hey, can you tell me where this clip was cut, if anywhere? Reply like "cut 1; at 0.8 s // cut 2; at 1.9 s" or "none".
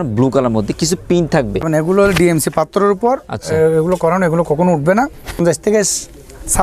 cut 1; at 1.7 s // cut 2; at 5.4 s

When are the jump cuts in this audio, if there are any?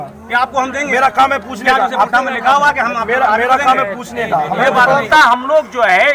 cut 1; at 5.1 s

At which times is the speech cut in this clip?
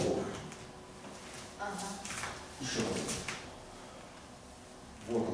none

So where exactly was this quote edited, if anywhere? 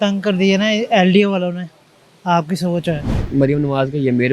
cut 1; at 3.1 s

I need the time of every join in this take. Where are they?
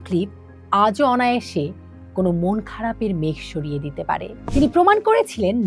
cut 1; at 4.3 s

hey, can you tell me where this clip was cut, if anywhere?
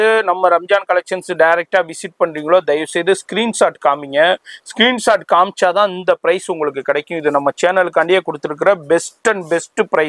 none

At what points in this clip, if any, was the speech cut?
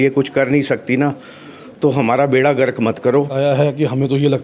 cut 1; at 3.3 s

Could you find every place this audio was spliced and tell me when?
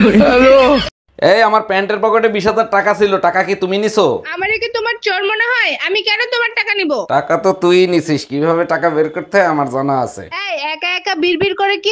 cut 1; at 1.1 s

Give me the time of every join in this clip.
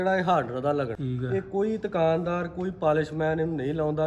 cut 1; at 1.0 s

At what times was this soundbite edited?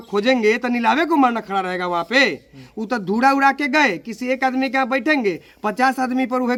none

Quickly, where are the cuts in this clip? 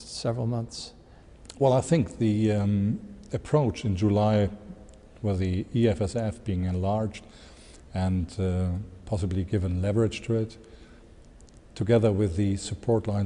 cut 1; at 12.2 s

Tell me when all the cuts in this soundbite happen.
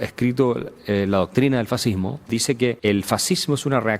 cut 1; at 2.3 s

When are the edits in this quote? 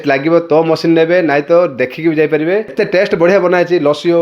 cut 1; at 2.7 s

